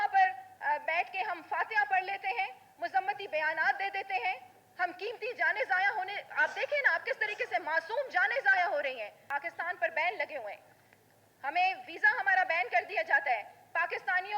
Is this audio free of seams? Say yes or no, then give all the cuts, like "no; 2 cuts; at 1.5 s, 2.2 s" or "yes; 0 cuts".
no; 1 cut; at 9.2 s